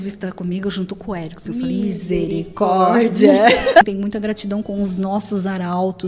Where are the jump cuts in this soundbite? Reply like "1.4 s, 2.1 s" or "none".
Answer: 3.8 s